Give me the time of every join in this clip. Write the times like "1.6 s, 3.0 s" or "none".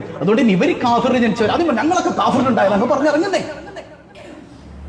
none